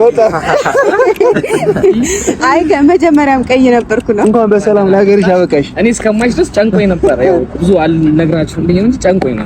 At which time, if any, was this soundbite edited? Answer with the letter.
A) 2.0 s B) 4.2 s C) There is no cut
B